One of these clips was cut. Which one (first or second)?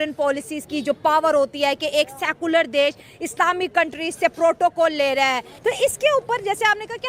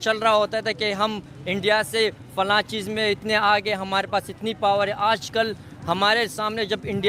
first